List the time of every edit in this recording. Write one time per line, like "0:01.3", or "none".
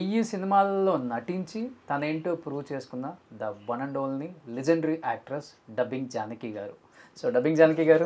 none